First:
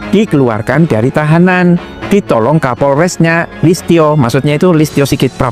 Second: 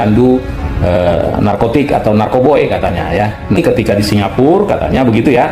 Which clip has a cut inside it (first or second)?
second